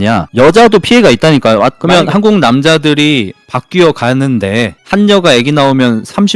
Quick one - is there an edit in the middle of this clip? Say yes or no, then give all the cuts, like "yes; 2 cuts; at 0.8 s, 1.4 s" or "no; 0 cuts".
yes; 1 cut; at 1.8 s